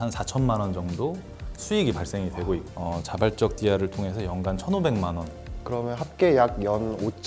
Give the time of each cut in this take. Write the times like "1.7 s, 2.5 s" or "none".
2.6 s